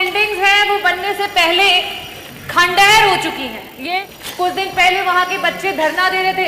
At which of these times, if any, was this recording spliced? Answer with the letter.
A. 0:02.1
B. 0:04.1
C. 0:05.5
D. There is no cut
B